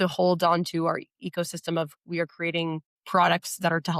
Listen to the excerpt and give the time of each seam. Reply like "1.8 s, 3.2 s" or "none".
2.9 s

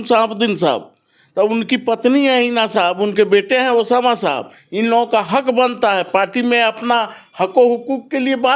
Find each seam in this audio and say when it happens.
none

